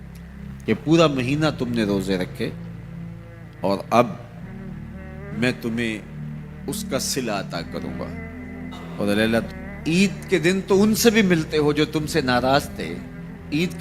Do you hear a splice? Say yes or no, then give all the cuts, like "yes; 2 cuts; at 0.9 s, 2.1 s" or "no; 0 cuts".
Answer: yes; 1 cut; at 9.5 s